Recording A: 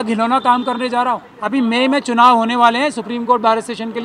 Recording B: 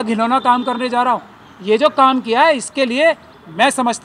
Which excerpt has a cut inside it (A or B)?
A